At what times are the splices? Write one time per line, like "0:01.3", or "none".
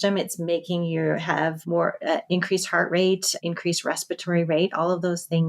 0:01.6
0:03.3